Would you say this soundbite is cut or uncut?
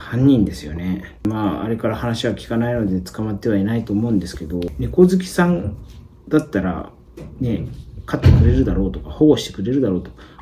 cut